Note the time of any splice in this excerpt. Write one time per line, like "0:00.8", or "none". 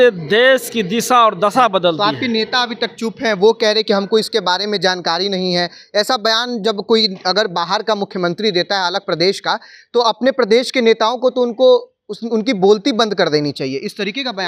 none